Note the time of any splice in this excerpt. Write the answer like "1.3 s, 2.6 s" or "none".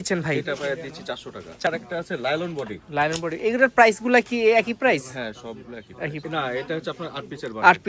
1.7 s, 6.2 s